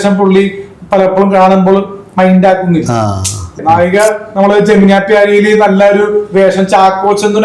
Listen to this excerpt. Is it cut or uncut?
cut